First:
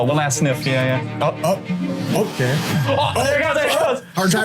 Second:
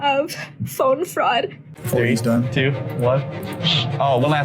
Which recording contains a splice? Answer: second; 1 cut; at 1.7 s

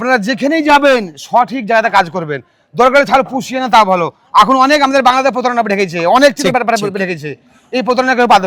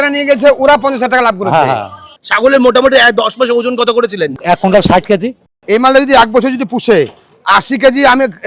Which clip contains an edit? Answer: second; 3 cuts; at 2.1 s, 4.4 s, 5.6 s

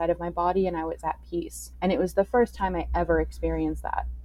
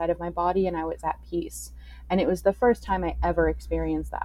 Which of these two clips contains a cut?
first; 1 cut; at 1.6 s

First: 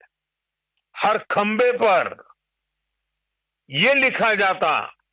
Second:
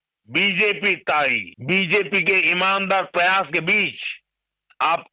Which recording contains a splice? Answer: second; 1 cut; at 1.5 s

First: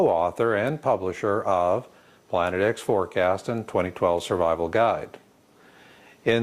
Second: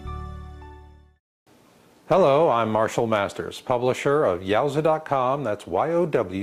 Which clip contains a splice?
first; 1 cut; at 1.9 s

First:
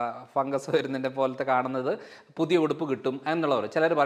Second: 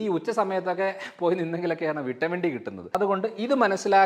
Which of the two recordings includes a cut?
second; 1 cut; at 2.9 s

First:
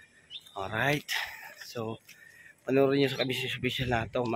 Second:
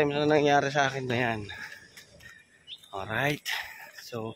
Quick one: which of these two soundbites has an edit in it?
second; 1 cut; at 1.1 s

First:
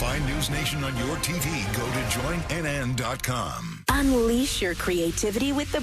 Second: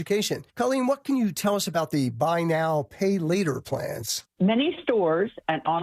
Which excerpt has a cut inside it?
first; 1 cut; at 3.7 s

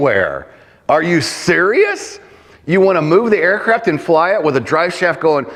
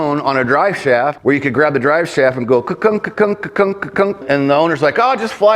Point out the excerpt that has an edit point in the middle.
second; 2 cuts; at 1.2 s, 4.2 s

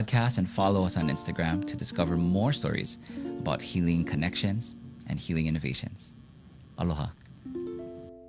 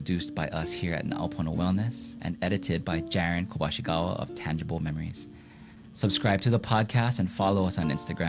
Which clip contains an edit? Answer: first; 1 cut; at 7.3 s

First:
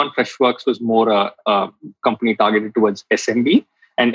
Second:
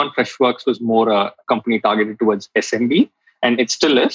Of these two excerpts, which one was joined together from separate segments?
second; 1 cut; at 1.4 s

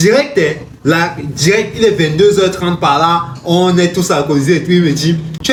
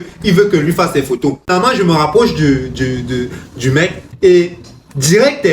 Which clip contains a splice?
second; 2 cuts; at 1.5 s, 4.0 s

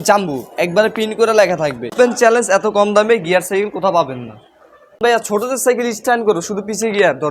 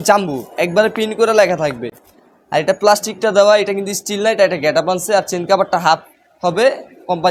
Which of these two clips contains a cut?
first; 2 cuts; at 1.9 s, 5.0 s

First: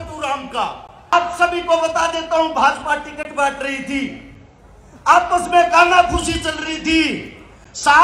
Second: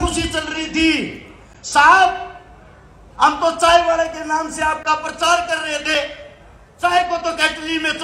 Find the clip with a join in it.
first; 1 cut; at 1.1 s

